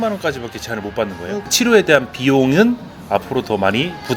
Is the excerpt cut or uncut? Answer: cut